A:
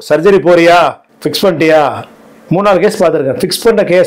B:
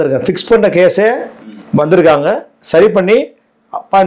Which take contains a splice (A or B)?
A